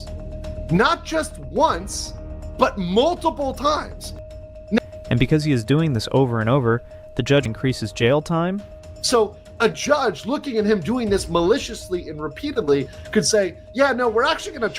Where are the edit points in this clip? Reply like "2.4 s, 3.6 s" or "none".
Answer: 7.5 s